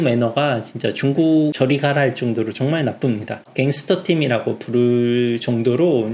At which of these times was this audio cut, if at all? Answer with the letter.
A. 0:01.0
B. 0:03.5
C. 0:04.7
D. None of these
B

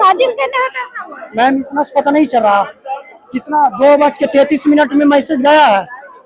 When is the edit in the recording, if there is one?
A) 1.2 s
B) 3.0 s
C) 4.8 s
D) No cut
D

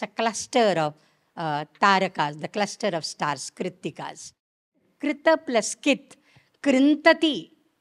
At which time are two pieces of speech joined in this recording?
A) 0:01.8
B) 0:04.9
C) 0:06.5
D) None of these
B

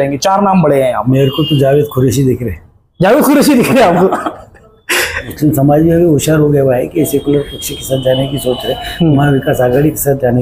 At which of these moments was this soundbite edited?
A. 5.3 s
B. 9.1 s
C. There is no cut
A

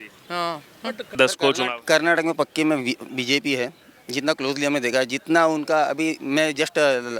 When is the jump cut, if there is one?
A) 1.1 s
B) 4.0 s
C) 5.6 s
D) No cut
A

